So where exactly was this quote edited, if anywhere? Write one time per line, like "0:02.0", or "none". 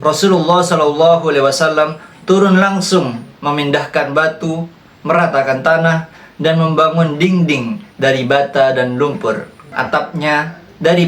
0:09.6